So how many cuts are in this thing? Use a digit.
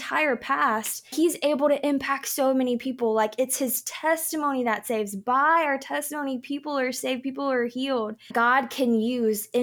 1